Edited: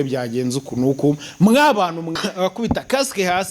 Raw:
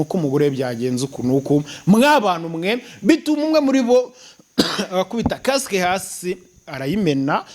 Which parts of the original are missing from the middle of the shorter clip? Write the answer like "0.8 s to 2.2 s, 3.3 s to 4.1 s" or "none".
2.6 s to 4.7 s